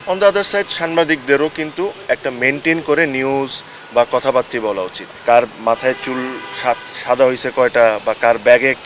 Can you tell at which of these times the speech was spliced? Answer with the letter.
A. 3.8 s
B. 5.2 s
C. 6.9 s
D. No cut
B